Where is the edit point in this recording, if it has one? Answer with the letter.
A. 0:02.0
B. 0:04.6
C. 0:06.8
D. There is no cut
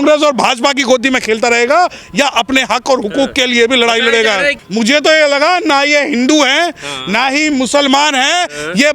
B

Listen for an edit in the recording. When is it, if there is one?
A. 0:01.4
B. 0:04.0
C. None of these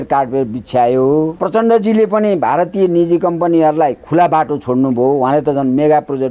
A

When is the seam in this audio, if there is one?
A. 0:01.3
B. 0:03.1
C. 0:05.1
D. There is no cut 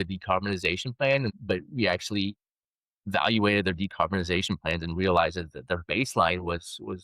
A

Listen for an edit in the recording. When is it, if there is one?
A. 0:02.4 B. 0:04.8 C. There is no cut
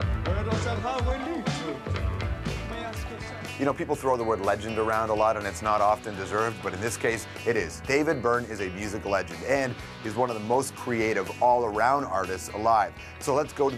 C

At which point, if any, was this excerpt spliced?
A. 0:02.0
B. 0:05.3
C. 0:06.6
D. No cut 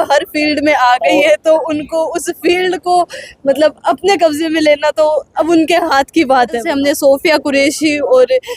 C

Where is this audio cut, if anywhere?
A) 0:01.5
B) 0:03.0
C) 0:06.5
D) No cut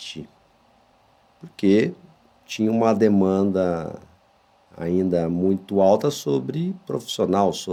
D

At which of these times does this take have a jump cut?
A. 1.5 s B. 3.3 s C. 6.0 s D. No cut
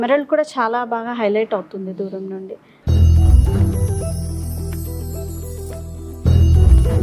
D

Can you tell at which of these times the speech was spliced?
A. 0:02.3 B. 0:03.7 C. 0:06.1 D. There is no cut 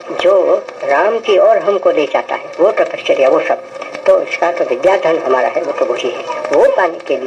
D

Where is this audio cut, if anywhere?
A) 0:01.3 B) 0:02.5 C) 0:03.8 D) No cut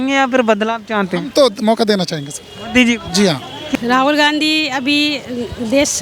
C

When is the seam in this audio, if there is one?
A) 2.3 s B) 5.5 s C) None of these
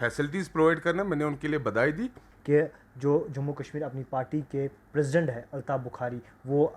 A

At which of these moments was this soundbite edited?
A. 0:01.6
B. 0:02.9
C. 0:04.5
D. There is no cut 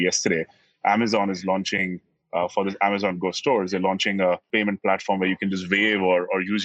C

